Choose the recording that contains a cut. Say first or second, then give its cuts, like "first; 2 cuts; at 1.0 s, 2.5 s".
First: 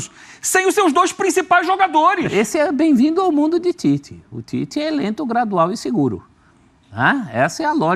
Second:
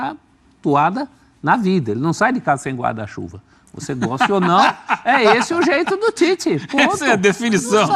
first; 1 cut; at 2.3 s